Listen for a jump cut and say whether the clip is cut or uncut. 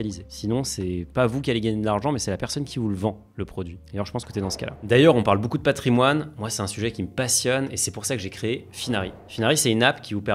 uncut